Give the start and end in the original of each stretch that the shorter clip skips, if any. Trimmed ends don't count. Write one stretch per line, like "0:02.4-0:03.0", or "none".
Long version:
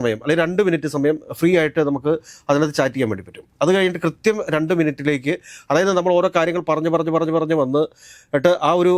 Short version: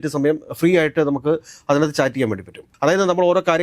0:03.4-0:05.5